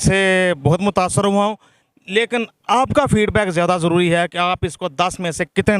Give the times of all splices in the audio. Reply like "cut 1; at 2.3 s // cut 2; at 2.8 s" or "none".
none